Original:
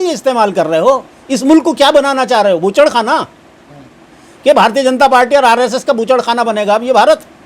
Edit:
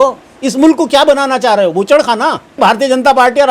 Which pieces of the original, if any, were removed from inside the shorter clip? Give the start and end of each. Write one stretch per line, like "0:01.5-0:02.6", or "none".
0:03.5-0:04.5